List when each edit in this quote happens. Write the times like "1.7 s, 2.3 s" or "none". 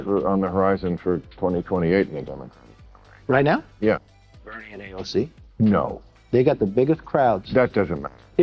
none